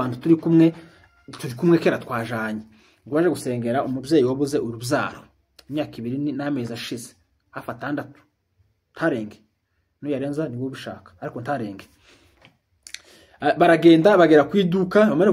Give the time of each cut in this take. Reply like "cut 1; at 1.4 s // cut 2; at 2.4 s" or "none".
none